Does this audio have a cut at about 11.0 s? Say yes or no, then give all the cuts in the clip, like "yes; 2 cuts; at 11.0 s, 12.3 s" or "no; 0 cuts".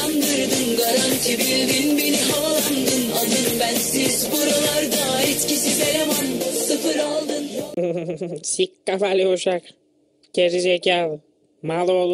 no; 1 cut; at 7.7 s